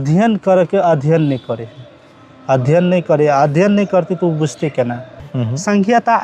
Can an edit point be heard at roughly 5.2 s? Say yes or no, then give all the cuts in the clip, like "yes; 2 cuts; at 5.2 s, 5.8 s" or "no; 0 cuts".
yes; 1 cut; at 5.2 s